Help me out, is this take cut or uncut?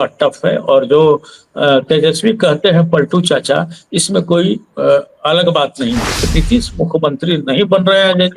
cut